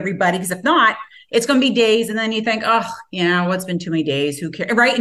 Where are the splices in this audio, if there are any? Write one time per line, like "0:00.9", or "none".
none